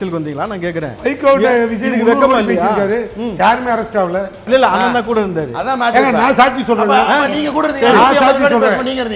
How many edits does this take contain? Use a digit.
1